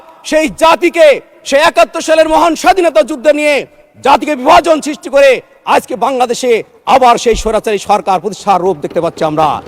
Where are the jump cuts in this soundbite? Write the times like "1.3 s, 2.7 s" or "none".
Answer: none